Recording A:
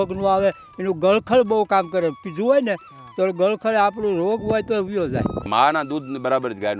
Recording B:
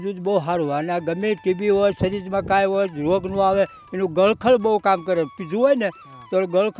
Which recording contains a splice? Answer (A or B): A